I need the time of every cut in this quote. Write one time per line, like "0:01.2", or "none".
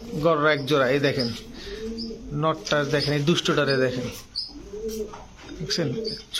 none